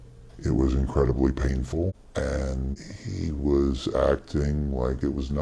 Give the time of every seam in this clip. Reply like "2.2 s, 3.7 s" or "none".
2.0 s, 2.7 s